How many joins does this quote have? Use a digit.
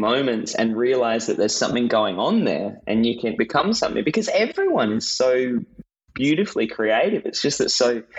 1